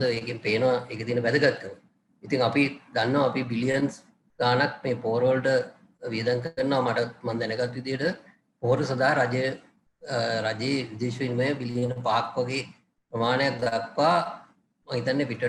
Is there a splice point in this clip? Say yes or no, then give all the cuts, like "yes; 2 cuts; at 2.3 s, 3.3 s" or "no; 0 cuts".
no; 0 cuts